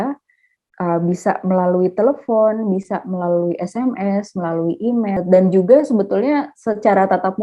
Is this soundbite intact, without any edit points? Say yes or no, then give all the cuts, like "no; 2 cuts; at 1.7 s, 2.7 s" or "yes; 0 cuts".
no; 1 cut; at 5.2 s